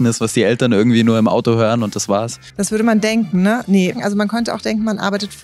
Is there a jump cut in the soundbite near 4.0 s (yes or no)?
yes